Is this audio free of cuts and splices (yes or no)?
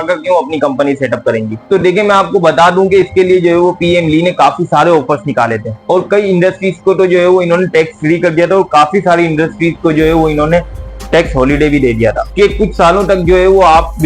yes